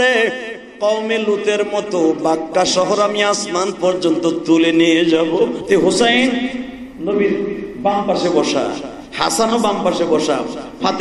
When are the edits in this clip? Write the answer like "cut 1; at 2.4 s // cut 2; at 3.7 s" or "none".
cut 1; at 5.6 s